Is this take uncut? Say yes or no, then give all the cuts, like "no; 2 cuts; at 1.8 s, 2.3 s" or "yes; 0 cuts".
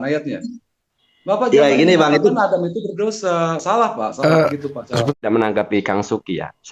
no; 1 cut; at 5.2 s